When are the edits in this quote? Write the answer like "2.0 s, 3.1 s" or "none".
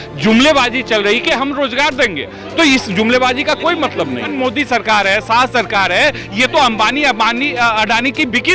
4.3 s

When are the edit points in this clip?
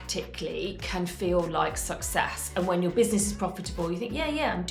none

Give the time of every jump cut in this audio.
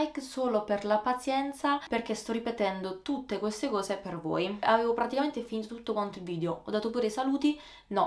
none

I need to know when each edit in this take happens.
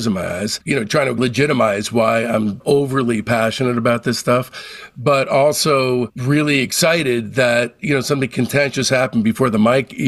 none

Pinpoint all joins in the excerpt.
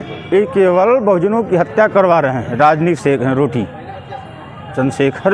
none

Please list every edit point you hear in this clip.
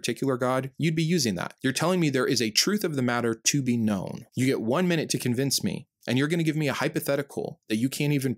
1.5 s

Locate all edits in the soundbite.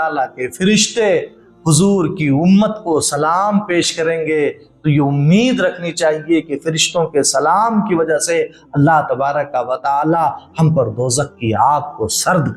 none

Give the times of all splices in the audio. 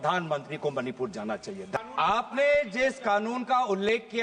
1.7 s

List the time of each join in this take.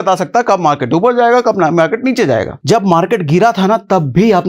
2.5 s

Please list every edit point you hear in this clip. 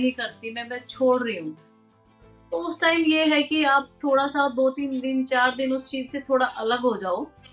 none

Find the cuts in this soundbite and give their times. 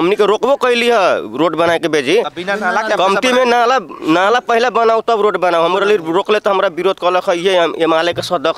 none

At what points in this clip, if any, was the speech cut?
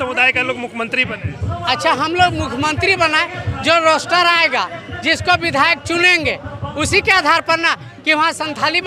none

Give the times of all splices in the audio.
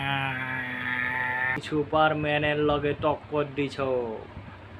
none

